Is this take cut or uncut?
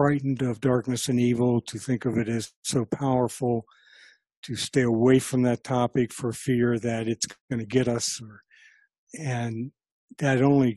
uncut